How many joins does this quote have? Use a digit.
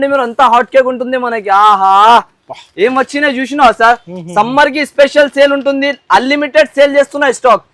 0